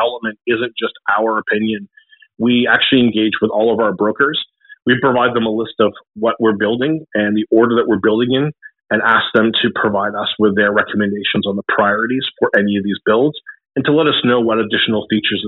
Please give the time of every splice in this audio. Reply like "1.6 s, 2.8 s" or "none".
none